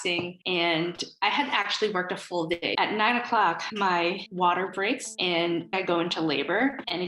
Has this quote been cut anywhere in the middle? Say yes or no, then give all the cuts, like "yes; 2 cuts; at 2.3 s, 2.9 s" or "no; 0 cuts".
yes; 2 cuts; at 2.8 s, 5.7 s